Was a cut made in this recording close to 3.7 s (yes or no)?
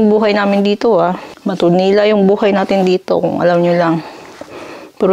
no